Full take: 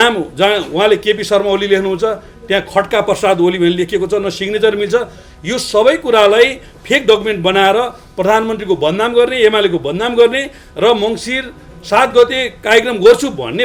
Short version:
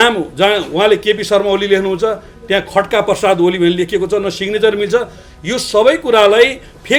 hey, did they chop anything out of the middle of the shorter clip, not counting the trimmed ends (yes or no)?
no